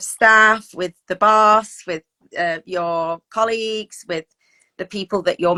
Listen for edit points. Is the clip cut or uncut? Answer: uncut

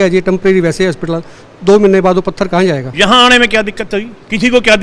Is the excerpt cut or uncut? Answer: cut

